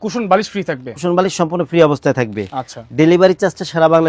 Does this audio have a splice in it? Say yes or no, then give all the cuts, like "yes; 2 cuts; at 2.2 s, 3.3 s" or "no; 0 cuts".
no; 0 cuts